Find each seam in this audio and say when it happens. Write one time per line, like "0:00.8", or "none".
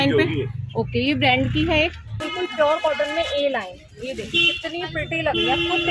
0:02.2